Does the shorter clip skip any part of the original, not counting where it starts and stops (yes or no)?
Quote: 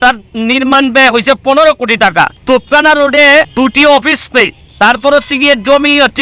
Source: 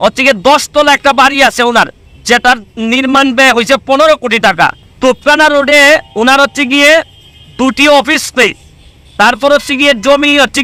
yes